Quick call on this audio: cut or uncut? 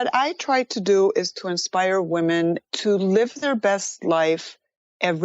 cut